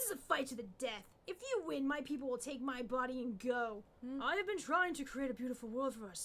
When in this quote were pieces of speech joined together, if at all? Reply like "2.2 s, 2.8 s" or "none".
3.9 s